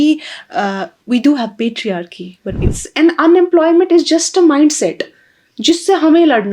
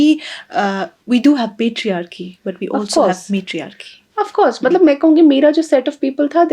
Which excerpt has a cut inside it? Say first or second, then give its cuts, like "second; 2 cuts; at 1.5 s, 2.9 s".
first; 1 cut; at 2.6 s